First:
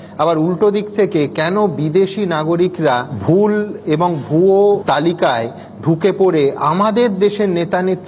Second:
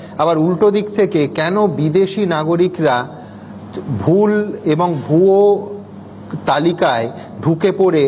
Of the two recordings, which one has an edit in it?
first; 2 cuts; at 3.1 s, 4.8 s

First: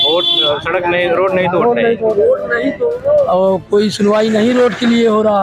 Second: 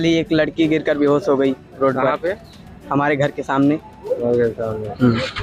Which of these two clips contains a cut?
first; 1 cut; at 2.9 s

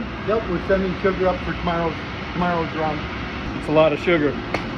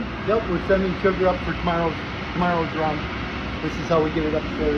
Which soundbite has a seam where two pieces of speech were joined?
first; 1 cut; at 3.5 s

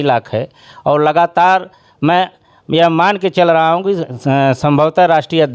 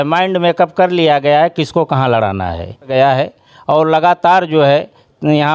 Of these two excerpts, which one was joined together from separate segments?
second; 1 cut; at 2.9 s

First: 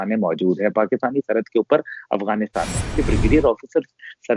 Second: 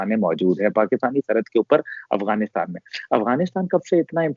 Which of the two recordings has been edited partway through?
first; 1 cut; at 2.9 s

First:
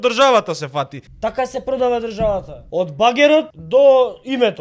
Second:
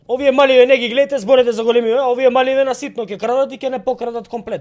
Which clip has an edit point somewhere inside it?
first; 3 cuts; at 1.0 s, 2.6 s, 3.6 s

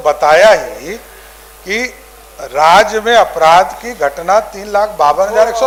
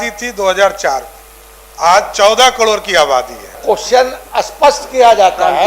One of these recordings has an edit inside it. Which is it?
second; 1 cut; at 3.6 s

